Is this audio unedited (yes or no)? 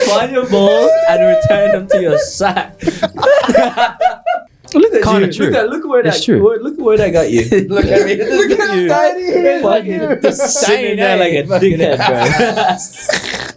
no